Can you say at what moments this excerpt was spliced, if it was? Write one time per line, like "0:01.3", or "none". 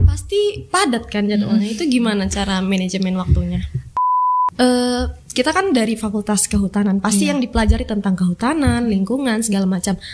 0:03.9